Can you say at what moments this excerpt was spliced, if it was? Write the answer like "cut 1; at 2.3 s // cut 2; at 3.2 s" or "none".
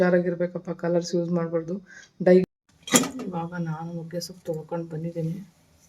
cut 1; at 2.4 s